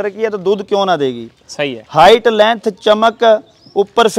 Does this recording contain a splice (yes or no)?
no